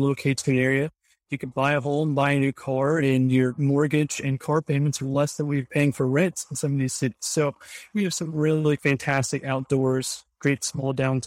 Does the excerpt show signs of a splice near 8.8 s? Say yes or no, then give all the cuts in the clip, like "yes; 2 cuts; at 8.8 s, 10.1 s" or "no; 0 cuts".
yes; 1 cut; at 8.8 s